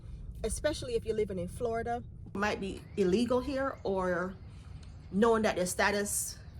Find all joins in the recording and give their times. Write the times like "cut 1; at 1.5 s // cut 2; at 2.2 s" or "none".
cut 1; at 2.4 s

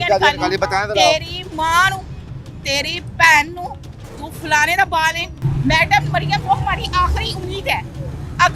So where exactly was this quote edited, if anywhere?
cut 1; at 5.3 s // cut 2; at 6.4 s

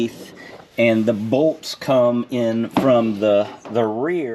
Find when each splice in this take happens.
none

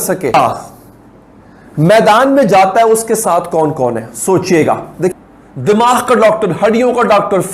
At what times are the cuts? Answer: cut 1; at 5.1 s

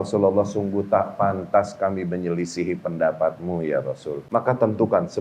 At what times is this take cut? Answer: cut 1; at 4.1 s

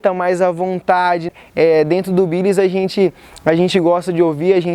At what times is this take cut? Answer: cut 1; at 1.4 s

